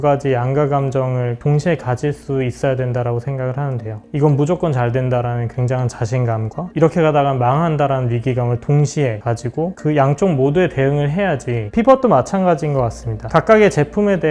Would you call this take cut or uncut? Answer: cut